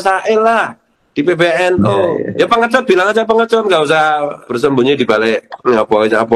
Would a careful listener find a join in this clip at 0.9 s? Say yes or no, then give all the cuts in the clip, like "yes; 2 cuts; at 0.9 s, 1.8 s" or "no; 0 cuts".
no; 3 cuts; at 2.2 s, 4.4 s, 5.5 s